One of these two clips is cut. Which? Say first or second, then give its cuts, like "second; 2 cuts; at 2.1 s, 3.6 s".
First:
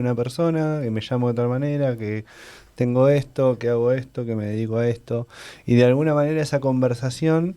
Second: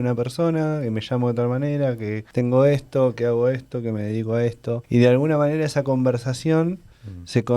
second; 2 cuts; at 2.2 s, 4.8 s